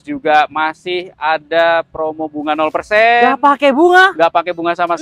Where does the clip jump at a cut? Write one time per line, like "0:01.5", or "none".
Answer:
none